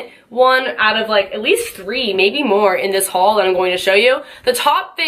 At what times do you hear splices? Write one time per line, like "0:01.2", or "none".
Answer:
none